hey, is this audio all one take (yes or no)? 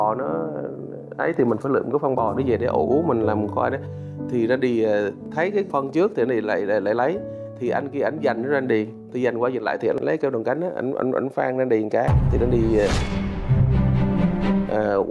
yes